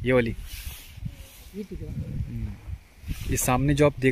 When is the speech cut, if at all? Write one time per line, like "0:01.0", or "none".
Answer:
0:02.9